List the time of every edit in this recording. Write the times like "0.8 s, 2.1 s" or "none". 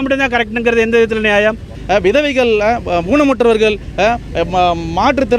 1.7 s

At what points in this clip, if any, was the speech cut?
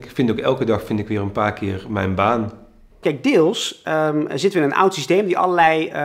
none

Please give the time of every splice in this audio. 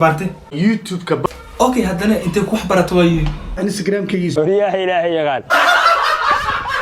none

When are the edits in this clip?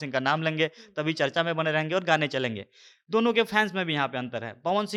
none

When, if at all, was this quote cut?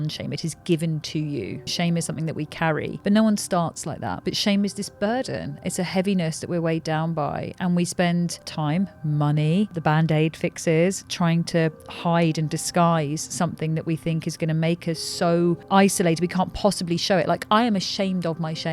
1.7 s, 2.9 s, 4.2 s, 8.4 s, 9.8 s, 15.6 s

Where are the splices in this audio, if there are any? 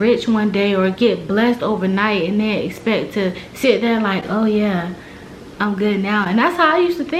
none

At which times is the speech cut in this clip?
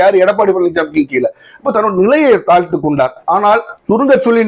3.2 s

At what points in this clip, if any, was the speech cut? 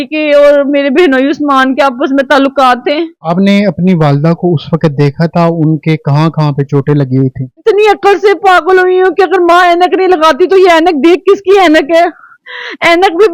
3.2 s, 7.5 s

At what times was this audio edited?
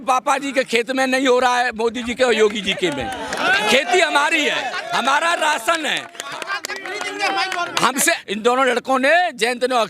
8.2 s

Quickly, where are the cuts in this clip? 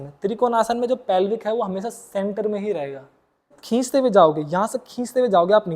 3.5 s

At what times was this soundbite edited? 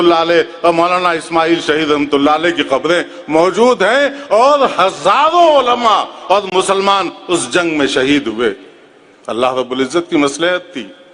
none

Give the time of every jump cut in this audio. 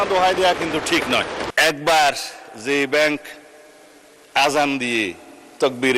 1.4 s

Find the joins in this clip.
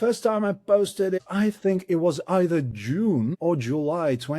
1.2 s, 3.3 s

